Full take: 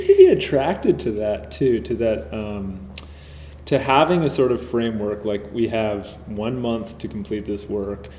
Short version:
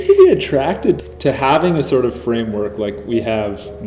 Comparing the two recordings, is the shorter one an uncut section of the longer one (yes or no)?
no